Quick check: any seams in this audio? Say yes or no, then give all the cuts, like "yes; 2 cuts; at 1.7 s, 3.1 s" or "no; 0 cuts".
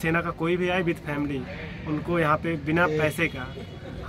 no; 0 cuts